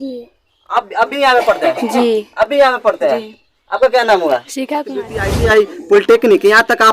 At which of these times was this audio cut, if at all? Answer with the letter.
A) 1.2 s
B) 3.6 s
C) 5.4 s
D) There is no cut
C